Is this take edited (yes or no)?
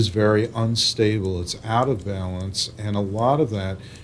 no